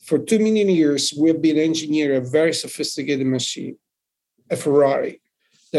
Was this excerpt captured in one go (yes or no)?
yes